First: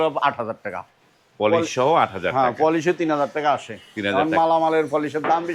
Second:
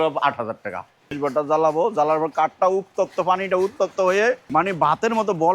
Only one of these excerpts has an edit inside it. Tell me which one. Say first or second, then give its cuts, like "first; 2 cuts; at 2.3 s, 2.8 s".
second; 2 cuts; at 1.1 s, 4.4 s